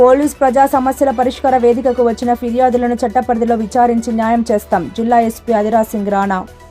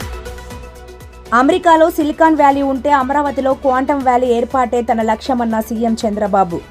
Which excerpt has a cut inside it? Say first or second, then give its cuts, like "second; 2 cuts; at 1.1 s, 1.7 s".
second; 1 cut; at 1.1 s